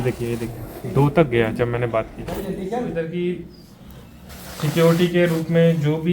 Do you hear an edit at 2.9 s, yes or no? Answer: yes